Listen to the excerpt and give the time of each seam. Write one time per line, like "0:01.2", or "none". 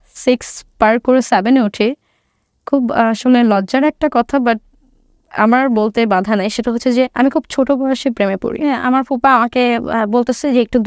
0:08.7